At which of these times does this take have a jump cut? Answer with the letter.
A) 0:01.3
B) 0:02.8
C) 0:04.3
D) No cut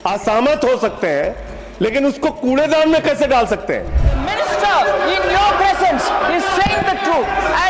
C